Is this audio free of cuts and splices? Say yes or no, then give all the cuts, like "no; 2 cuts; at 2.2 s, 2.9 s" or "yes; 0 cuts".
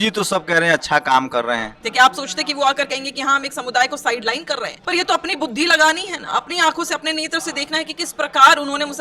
no; 2 cuts; at 1.8 s, 4.7 s